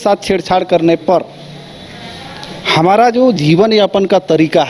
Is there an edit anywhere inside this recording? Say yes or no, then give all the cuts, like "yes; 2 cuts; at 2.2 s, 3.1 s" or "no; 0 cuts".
no; 0 cuts